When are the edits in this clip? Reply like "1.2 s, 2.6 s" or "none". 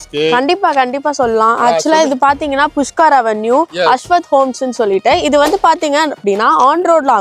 1.6 s